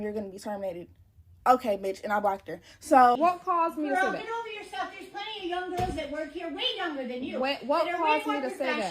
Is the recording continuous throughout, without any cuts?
no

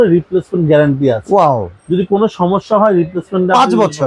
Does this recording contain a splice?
no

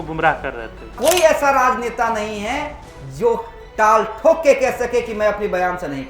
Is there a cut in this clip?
yes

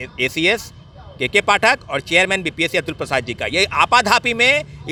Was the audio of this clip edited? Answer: no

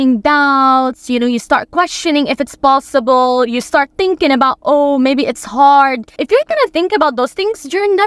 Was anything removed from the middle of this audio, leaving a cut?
no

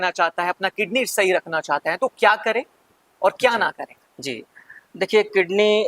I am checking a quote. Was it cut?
no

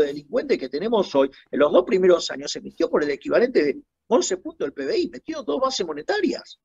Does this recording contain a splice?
no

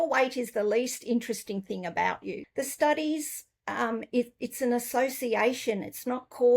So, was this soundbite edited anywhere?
yes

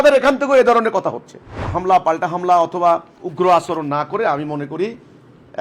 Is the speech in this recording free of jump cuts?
no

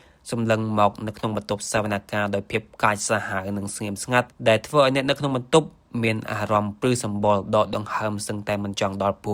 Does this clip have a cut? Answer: no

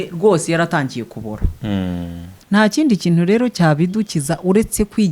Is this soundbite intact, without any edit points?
no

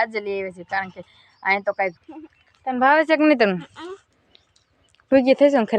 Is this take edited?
yes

